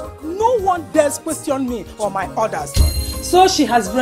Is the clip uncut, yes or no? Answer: no